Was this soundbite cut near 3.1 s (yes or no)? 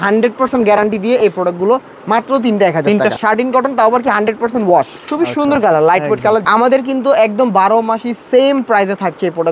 yes